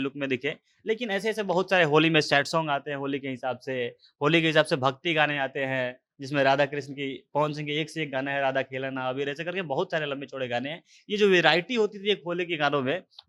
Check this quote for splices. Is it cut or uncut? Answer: uncut